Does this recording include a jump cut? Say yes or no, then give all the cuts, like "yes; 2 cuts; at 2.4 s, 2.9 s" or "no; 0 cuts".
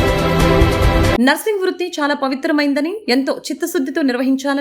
yes; 1 cut; at 1.1 s